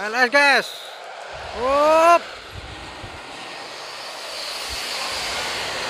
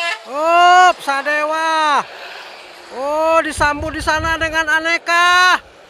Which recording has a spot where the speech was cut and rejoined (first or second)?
first